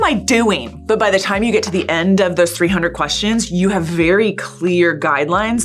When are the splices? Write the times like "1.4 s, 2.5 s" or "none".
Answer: none

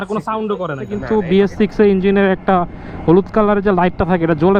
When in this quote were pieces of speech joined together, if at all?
1.0 s

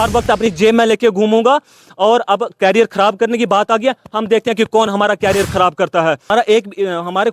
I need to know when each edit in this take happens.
6.2 s

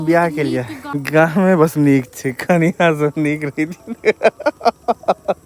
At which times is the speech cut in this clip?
1.0 s

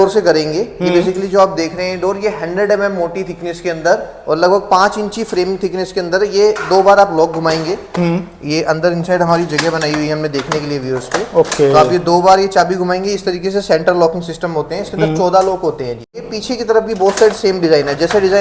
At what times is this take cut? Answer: none

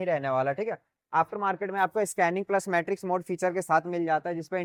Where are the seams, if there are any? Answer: none

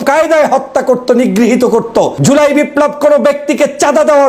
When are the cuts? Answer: 2.2 s

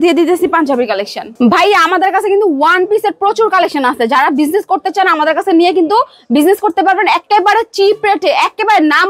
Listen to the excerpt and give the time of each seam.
none

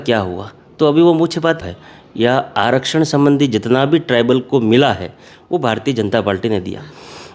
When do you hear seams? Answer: 1.6 s

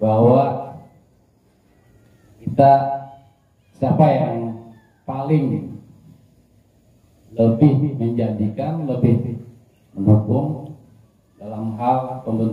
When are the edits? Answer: none

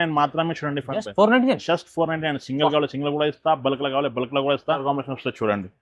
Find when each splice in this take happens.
4.8 s

